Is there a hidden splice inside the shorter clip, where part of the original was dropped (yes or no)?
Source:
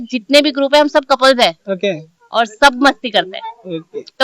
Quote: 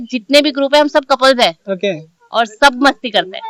no